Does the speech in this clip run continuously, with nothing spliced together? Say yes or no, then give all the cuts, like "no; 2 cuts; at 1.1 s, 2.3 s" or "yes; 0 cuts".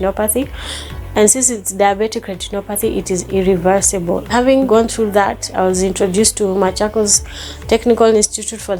no; 1 cut; at 4.7 s